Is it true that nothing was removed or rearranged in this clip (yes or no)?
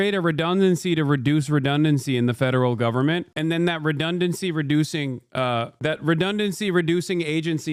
yes